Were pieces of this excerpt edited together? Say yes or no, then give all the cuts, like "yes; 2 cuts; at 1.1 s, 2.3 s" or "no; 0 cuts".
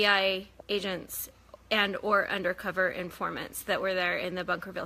no; 0 cuts